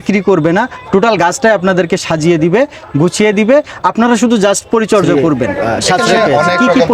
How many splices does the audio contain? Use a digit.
1